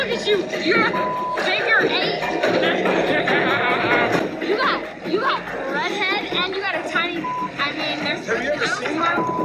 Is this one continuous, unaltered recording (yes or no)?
yes